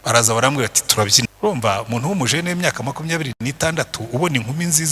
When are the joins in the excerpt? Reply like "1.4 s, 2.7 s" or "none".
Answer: 1.3 s